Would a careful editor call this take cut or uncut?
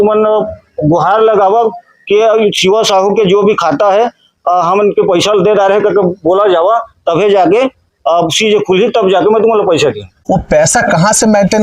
cut